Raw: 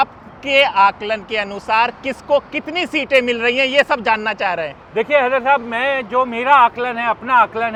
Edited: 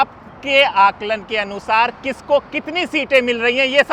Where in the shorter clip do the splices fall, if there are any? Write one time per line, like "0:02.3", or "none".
none